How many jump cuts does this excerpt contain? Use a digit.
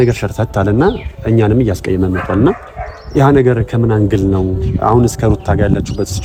0